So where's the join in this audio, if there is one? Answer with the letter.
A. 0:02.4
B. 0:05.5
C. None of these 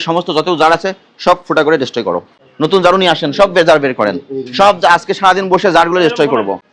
A